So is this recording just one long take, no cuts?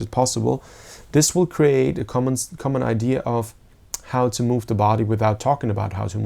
yes; 0 cuts

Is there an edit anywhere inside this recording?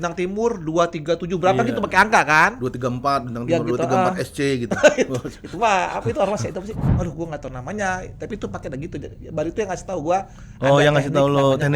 yes; 1 cut; at 6.8 s

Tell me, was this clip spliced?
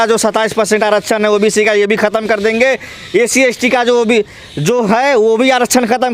no; 0 cuts

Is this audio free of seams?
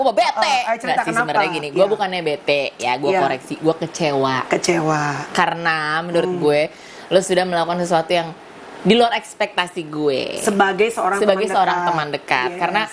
yes; 0 cuts

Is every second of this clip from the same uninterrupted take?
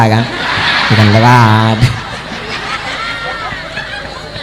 yes; 0 cuts

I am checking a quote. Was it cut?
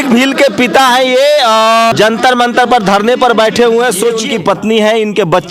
yes; 2 cuts; at 1.9 s, 4.2 s

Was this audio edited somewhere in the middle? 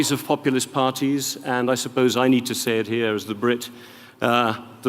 yes; 1 cut; at 1.8 s

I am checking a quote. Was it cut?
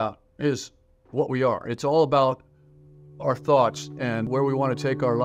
yes; 1 cut; at 4.3 s

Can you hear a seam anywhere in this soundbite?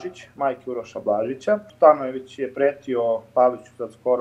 yes; 1 cut; at 1.7 s

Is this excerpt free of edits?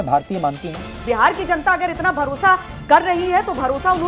no; 1 cut; at 1.0 s

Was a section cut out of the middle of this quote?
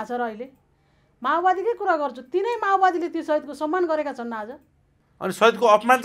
no; 0 cuts

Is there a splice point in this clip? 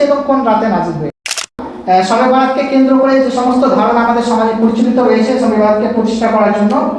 yes; 1 cut; at 1.7 s

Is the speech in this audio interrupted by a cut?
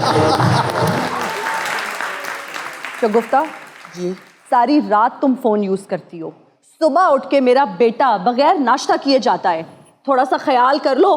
yes; 1 cut; at 1.0 s

